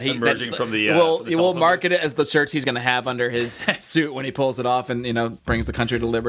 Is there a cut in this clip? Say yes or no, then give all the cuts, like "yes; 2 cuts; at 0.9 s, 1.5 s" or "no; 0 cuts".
yes; 1 cut; at 5.4 s